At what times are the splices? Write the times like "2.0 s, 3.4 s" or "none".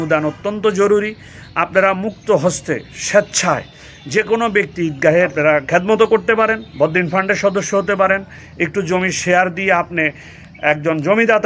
5.3 s